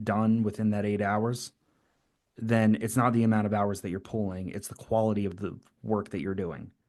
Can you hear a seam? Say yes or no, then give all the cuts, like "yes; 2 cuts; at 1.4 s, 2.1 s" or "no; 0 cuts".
no; 0 cuts